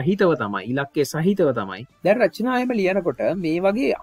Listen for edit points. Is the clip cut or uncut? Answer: cut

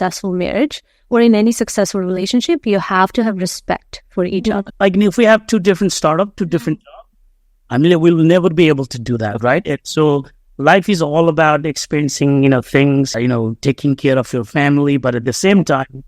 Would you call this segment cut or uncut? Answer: cut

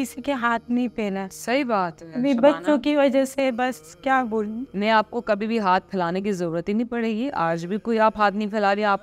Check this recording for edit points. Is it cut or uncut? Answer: uncut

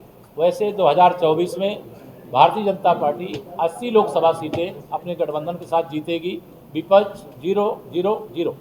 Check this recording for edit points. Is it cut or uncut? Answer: uncut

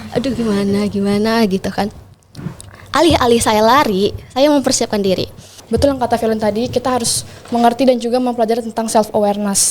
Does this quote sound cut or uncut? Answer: cut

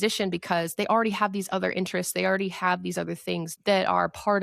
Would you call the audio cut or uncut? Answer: cut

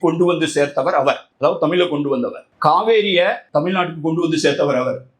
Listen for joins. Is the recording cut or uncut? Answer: cut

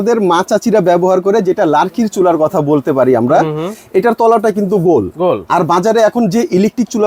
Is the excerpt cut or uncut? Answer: uncut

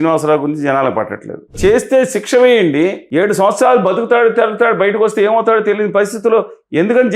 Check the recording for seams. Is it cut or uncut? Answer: cut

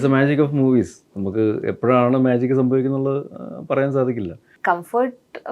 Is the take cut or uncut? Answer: cut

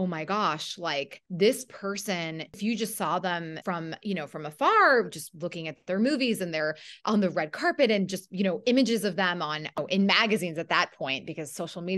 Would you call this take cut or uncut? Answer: cut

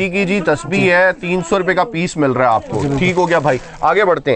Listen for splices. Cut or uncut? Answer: uncut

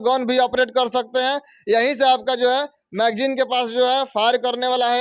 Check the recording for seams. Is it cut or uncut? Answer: uncut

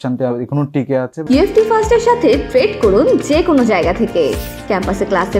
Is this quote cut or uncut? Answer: cut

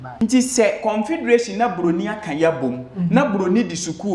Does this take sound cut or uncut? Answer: uncut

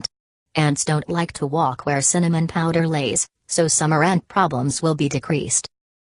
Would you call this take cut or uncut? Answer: uncut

